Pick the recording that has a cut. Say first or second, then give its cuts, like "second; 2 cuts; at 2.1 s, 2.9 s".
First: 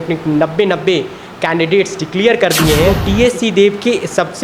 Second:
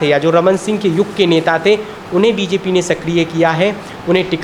first; 1 cut; at 3.0 s